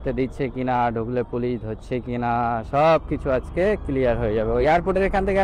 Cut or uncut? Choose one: cut